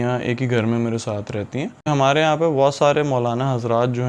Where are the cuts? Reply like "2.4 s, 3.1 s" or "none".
1.9 s